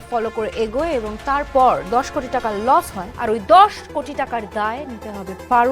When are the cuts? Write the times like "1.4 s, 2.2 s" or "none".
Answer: 3.0 s